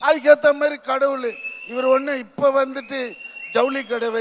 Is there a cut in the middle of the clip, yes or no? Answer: no